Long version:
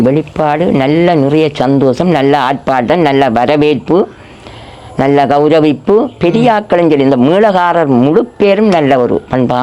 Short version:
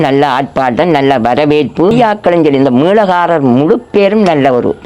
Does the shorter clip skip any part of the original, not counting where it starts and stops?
yes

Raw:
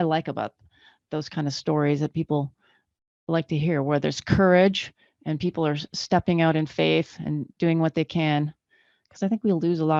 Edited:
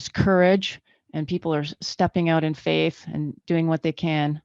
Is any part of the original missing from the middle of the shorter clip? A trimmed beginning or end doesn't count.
no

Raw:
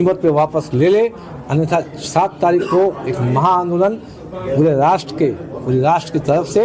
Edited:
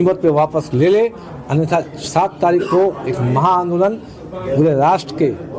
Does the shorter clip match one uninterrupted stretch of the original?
yes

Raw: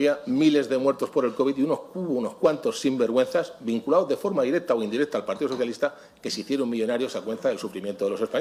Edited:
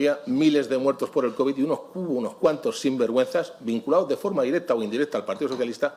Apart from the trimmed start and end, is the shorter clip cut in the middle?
no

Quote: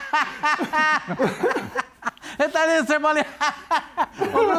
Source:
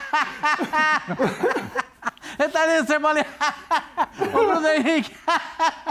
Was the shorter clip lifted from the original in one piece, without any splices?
yes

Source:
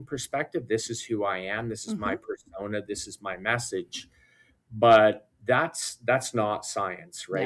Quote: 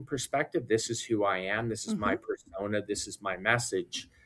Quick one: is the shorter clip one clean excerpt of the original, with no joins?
yes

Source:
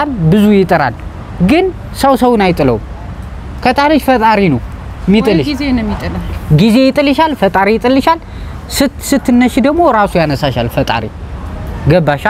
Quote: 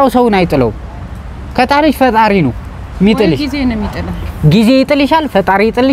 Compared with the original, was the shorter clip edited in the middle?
no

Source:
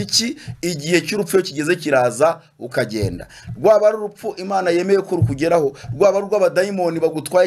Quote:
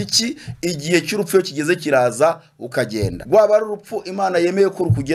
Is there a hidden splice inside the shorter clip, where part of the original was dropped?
yes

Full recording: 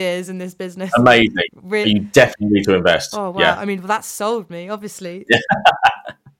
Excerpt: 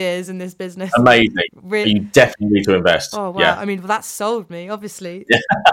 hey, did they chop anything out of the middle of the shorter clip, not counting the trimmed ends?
no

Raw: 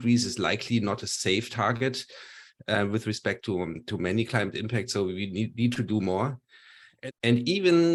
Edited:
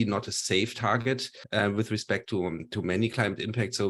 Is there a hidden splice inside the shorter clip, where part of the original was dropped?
yes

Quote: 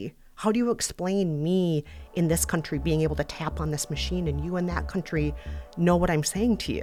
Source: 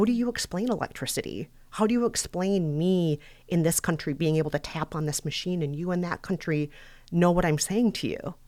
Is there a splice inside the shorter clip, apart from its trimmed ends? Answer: no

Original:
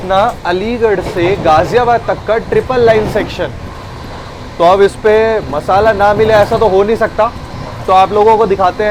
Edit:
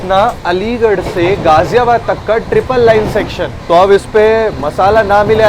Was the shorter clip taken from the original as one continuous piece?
no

